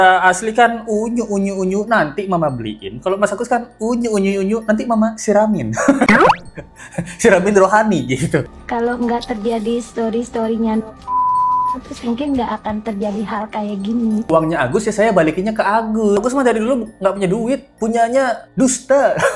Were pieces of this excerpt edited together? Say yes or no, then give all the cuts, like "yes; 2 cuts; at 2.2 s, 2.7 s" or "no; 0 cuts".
yes; 3 cuts; at 8.6 s, 14.3 s, 16.2 s